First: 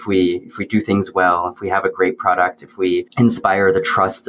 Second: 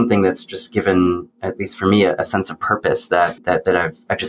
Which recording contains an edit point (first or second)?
first